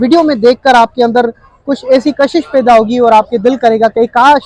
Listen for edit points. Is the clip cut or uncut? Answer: uncut